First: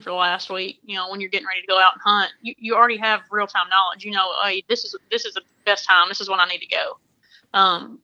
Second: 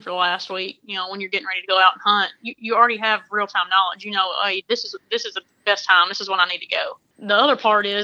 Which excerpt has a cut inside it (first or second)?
second